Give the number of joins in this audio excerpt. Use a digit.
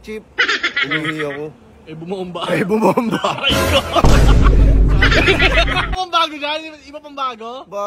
1